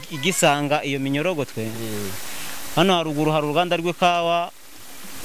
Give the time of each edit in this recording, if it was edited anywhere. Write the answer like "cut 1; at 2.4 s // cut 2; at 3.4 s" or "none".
none